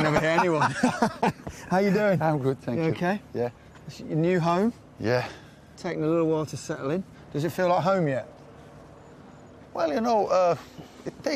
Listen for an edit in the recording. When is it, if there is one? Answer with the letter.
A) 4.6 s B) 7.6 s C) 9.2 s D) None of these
B